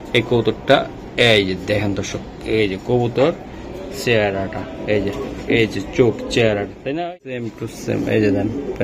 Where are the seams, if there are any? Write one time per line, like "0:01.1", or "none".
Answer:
0:07.6